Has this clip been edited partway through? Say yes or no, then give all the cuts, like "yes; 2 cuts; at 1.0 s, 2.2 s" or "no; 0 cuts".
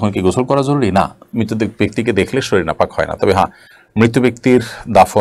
no; 0 cuts